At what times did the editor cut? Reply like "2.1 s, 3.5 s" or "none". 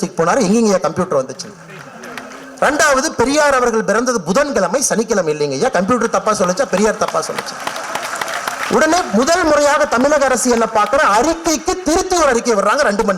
none